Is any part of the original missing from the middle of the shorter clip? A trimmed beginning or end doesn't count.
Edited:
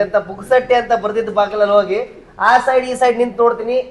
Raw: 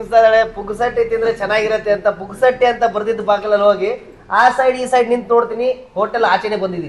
no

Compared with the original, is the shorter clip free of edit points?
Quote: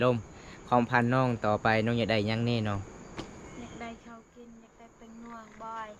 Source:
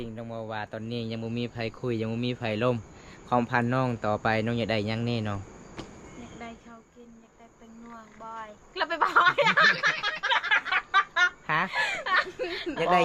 yes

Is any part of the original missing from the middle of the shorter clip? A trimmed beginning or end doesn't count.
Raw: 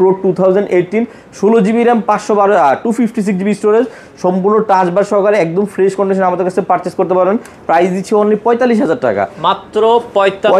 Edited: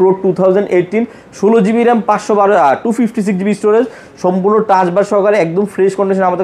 no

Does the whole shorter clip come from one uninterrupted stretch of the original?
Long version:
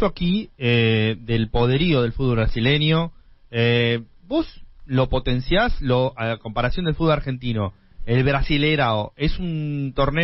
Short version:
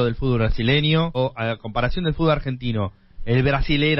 no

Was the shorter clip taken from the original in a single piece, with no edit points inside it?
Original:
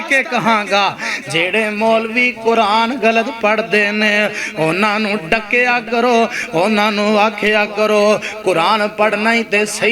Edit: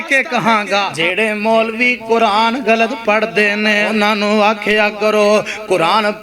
no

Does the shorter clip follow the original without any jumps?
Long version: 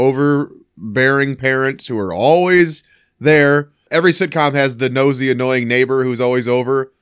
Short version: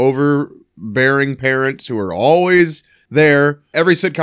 no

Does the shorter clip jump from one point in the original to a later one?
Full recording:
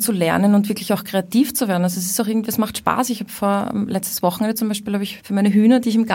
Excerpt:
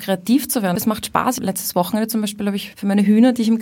yes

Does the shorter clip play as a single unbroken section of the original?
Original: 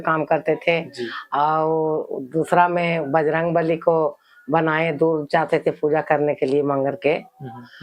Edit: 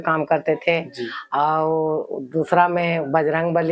yes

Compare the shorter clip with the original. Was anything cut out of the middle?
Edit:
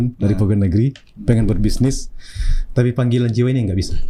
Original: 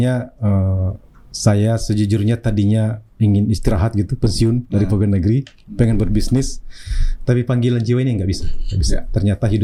no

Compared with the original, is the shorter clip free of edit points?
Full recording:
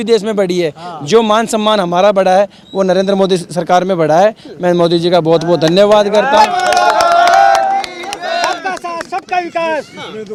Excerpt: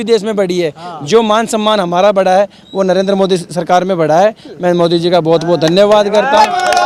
yes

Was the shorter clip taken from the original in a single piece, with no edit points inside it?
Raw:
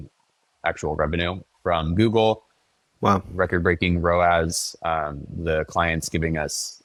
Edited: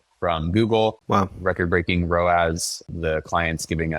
no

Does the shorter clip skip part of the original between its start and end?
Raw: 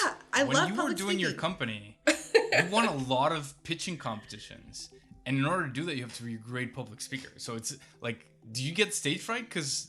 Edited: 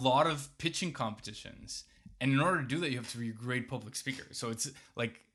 no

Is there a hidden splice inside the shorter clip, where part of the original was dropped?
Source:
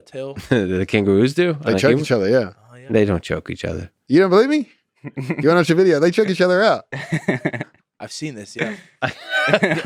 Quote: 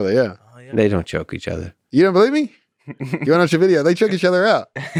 no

